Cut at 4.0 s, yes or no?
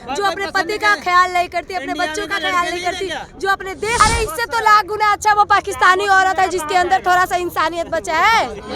yes